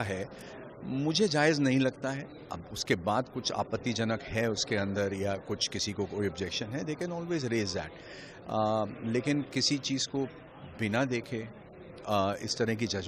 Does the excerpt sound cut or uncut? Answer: uncut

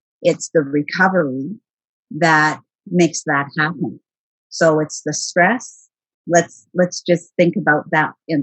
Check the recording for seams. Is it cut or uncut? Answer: cut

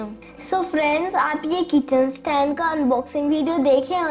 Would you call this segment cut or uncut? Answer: uncut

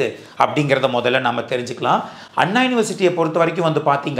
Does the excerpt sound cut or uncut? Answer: uncut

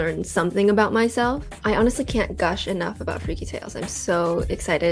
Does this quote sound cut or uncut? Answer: uncut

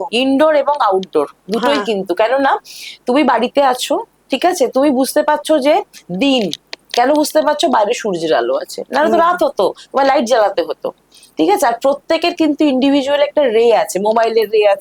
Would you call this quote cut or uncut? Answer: uncut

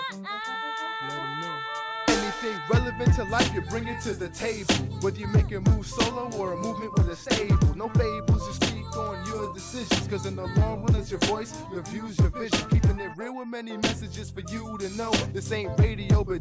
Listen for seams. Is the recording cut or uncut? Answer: uncut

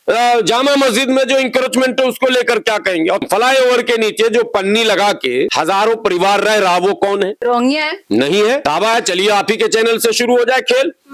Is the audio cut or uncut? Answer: cut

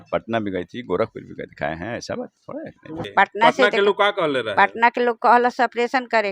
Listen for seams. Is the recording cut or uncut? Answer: cut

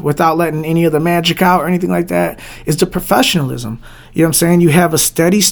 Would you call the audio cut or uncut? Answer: uncut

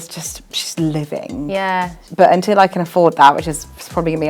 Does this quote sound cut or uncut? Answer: cut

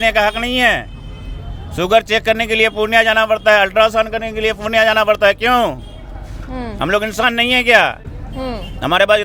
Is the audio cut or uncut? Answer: uncut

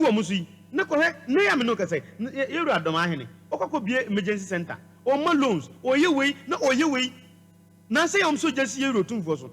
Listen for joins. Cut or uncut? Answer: uncut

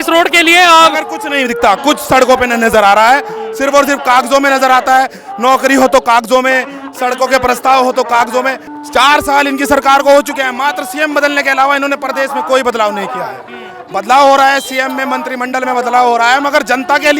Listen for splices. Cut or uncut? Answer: cut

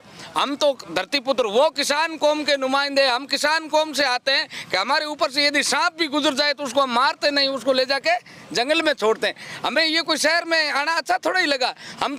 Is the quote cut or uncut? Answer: uncut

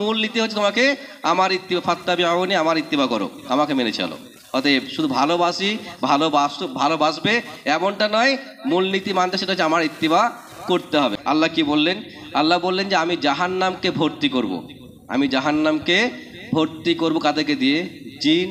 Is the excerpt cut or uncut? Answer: cut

